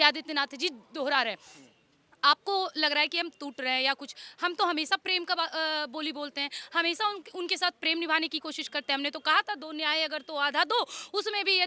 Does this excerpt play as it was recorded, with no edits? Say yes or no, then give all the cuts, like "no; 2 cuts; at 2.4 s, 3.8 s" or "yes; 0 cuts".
yes; 0 cuts